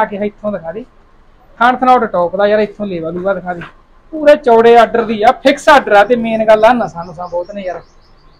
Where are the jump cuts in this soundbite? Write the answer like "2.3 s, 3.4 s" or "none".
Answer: none